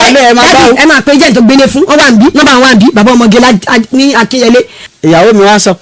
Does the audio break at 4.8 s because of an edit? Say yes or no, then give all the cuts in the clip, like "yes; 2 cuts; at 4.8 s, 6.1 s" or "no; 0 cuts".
yes; 1 cut; at 4.8 s